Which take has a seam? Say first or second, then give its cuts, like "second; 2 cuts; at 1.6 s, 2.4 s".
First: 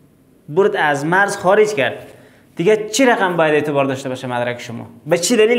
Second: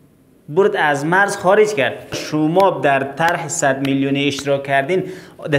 second; 1 cut; at 2.2 s